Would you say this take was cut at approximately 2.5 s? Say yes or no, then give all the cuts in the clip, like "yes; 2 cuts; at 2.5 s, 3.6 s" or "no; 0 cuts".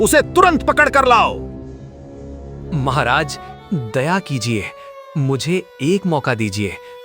yes; 1 cut; at 2.5 s